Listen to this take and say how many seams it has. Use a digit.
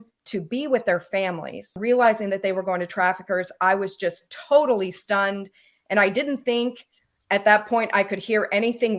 1